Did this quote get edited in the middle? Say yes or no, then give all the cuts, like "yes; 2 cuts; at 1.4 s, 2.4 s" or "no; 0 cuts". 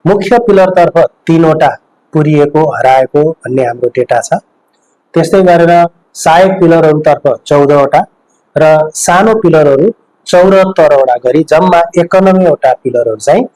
no; 0 cuts